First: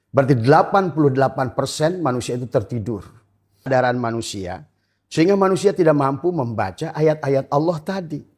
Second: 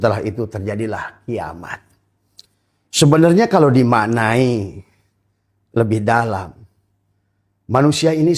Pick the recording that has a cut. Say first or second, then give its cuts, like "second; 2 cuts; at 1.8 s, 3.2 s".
first; 1 cut; at 3.7 s